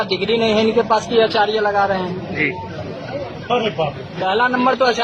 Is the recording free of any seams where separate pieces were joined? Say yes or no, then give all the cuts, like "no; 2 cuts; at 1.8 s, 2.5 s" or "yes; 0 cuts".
yes; 0 cuts